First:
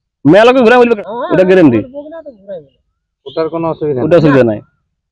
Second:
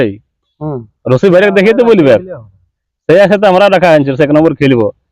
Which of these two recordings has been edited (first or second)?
first